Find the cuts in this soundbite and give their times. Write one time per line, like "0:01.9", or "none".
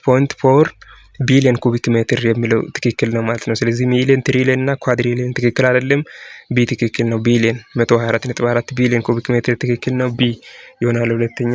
none